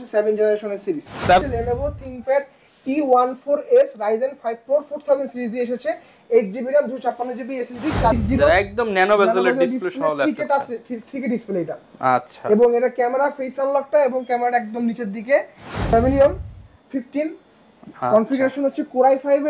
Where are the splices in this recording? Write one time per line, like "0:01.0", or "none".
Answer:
0:01.4
0:08.1
0:15.9